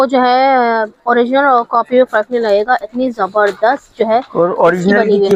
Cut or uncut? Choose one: uncut